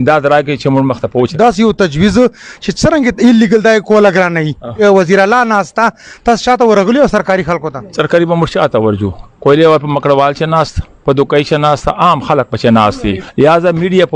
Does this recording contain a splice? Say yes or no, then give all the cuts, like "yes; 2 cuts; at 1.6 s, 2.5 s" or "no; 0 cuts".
yes; 3 cuts; at 1.3 s, 4.8 s, 13.2 s